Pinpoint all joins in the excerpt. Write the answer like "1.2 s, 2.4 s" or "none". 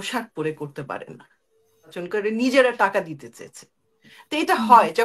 2.0 s